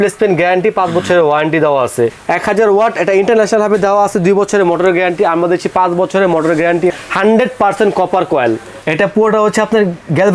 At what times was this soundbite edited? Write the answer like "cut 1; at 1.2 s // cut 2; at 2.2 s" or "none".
cut 1; at 2.2 s // cut 2; at 6.9 s // cut 3; at 8.8 s